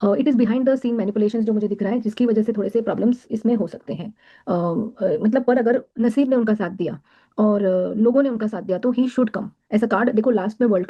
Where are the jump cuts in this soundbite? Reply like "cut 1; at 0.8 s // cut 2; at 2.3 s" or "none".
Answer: cut 1; at 3.8 s

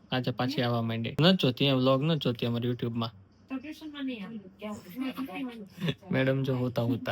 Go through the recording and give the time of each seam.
cut 1; at 1.1 s

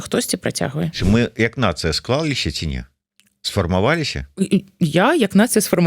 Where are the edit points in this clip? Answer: cut 1; at 1.0 s

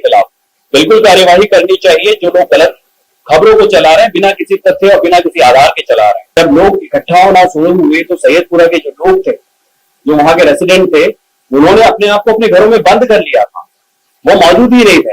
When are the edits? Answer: cut 1; at 6.2 s

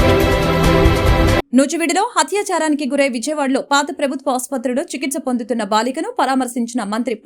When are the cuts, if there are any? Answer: cut 1; at 0.9 s

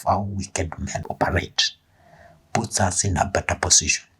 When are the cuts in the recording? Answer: cut 1; at 1.0 s

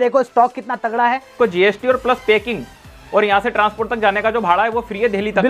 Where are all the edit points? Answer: cut 1; at 1.3 s

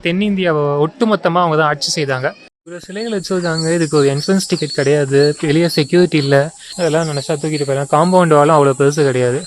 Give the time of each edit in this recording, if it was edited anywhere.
cut 1; at 2.5 s // cut 2; at 6.6 s

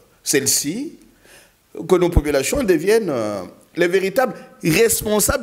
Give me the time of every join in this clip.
none

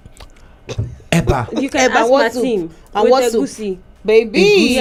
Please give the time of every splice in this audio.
none

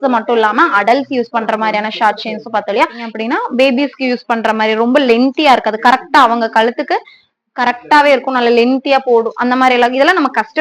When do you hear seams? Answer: cut 1; at 3.0 s

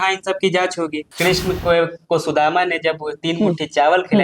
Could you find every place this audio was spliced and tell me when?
cut 1; at 1.1 s

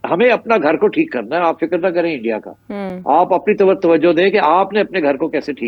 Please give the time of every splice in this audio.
none

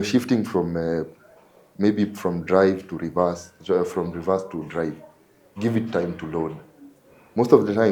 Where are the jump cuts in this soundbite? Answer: cut 1; at 3.5 s

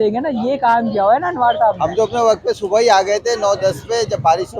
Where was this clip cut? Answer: cut 1; at 1.8 s

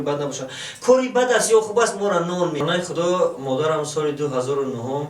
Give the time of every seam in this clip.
cut 1; at 2.6 s

